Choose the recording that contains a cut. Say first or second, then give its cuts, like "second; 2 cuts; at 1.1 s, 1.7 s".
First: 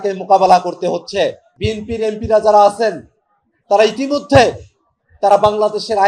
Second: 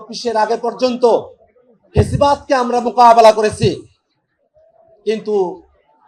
first; 1 cut; at 1.5 s